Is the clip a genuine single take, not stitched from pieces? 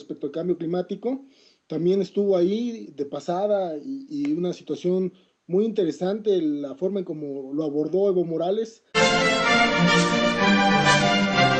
yes; 0 cuts

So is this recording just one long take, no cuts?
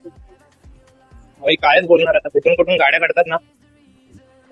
yes; 0 cuts

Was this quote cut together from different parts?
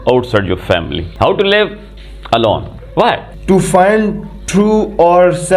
yes; 2 cuts; at 1.0 s, 3.3 s

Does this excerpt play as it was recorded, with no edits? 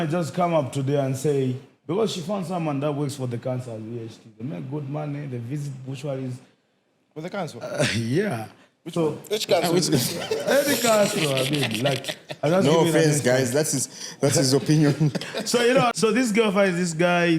yes; 0 cuts

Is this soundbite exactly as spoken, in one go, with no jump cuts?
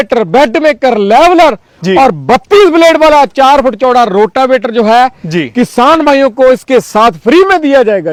yes; 0 cuts

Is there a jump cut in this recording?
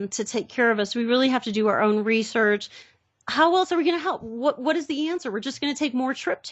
no; 0 cuts

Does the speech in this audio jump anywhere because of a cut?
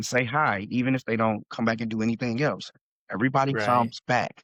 no; 0 cuts

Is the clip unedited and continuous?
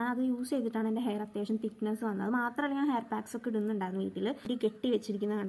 no; 1 cut; at 4.5 s

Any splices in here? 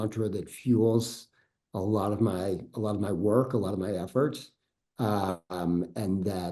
no; 0 cuts

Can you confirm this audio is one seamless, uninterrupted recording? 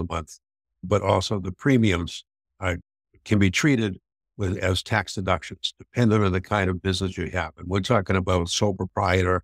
no; 1 cut; at 2.5 s

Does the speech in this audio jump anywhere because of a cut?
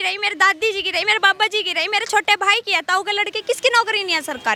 no; 0 cuts

